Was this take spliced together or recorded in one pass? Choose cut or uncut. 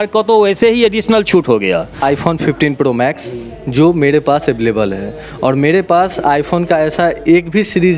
cut